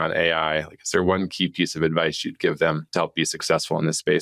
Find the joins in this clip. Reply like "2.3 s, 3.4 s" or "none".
2.8 s